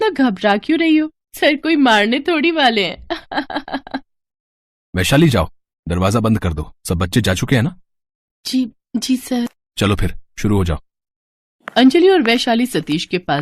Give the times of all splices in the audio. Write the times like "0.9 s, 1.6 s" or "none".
9.6 s